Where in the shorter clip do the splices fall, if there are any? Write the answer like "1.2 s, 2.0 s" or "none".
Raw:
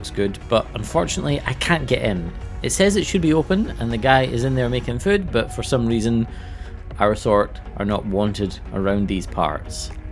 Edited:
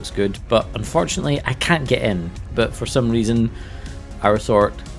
2.5 s